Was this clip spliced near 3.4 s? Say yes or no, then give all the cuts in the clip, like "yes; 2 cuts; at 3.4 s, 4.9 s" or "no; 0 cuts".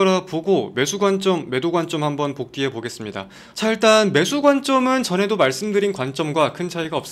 yes; 1 cut; at 3.4 s